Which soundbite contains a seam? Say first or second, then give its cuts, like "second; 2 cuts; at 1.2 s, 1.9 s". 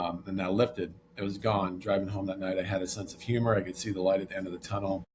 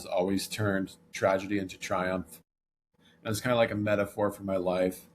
second; 2 cuts; at 1.1 s, 2.9 s